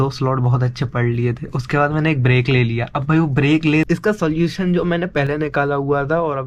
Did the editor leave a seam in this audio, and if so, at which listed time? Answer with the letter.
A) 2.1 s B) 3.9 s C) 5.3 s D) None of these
B